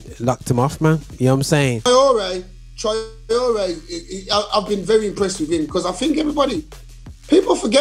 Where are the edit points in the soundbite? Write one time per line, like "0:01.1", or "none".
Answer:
0:01.8